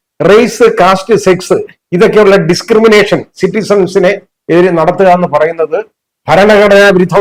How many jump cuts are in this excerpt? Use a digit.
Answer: 0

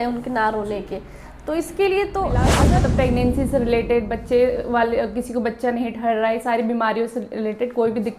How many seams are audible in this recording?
1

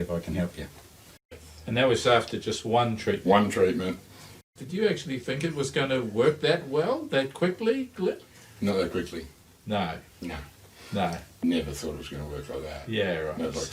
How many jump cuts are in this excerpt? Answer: 2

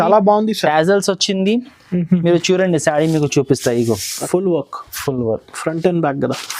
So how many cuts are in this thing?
1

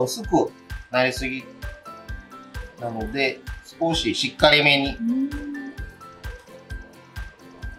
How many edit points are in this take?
0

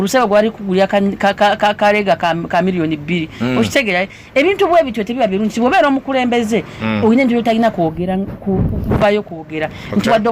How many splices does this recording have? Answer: 0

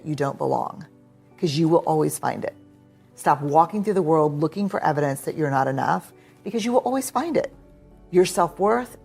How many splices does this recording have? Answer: 0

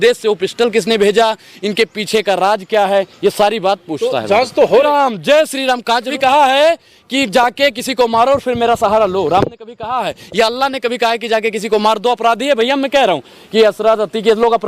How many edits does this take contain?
2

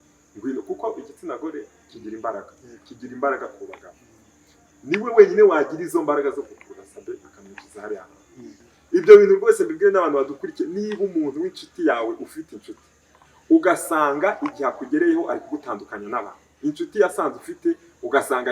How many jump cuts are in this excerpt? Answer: 1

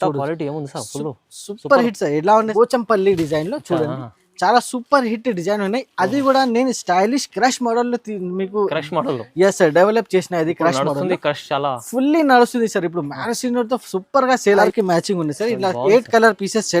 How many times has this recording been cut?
2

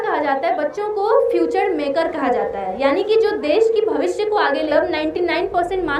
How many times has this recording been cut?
1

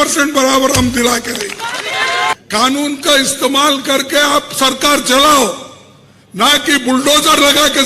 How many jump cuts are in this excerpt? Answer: 1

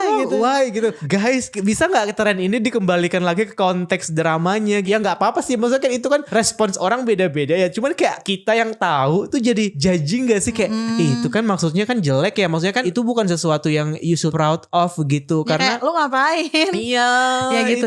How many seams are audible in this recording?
8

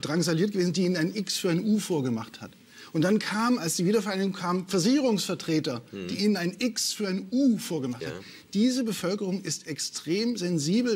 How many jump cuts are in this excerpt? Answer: 0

